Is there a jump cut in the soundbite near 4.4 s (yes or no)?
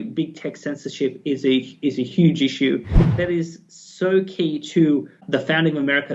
no